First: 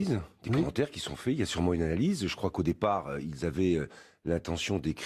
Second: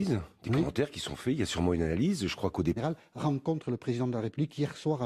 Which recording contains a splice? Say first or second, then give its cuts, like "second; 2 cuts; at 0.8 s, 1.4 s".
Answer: first; 1 cut; at 2.8 s